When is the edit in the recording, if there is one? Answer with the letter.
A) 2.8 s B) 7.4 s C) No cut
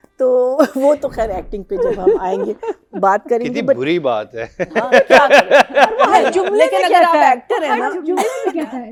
C